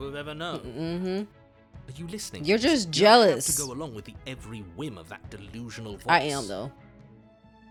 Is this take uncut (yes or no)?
yes